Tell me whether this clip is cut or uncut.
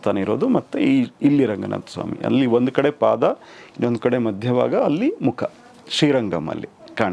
uncut